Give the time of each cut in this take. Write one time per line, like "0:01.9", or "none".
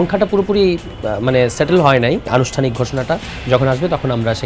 0:02.3